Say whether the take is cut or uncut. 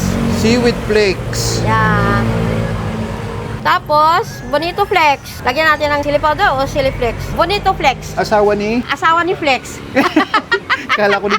cut